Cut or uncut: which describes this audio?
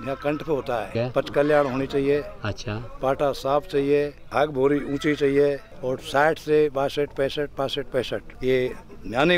cut